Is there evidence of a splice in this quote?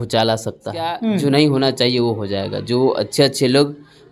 yes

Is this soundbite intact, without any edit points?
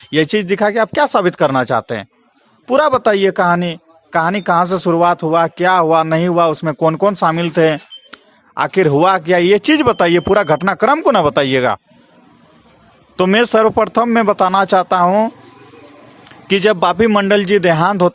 yes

